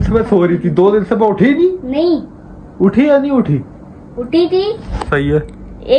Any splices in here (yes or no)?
no